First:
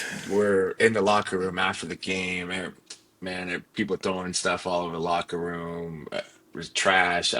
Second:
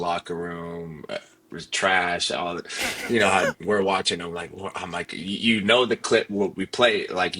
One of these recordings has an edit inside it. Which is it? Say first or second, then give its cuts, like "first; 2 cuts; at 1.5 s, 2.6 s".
second; 1 cut; at 3.5 s